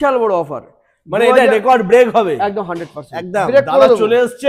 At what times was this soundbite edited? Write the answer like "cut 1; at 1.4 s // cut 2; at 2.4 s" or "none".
none